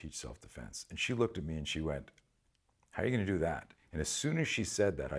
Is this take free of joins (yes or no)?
yes